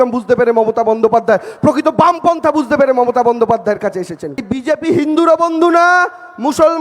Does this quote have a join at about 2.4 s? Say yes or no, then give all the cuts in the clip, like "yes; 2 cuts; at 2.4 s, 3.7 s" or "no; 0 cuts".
no; 1 cut; at 4.5 s